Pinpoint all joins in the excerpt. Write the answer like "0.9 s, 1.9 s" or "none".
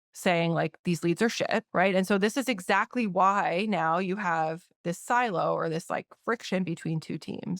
1.7 s